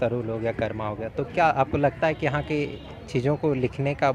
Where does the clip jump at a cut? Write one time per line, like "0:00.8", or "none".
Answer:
none